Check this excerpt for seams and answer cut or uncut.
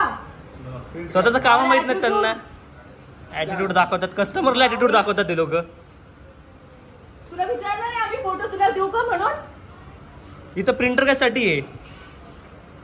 uncut